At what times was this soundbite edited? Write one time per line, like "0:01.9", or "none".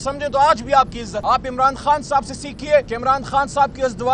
0:01.1
0:02.9